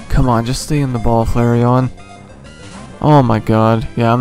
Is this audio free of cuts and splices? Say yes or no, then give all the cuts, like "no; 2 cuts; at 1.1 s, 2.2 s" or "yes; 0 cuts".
yes; 0 cuts